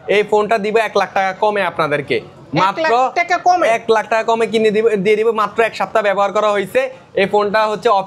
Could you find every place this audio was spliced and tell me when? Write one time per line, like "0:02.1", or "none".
none

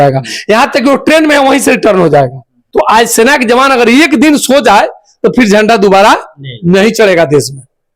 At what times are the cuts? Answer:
0:02.6

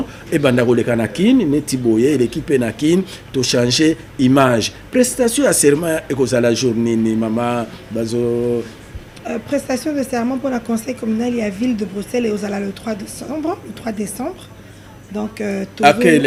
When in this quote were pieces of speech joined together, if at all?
none

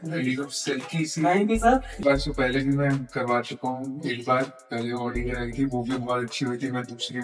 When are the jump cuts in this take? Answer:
0:02.0

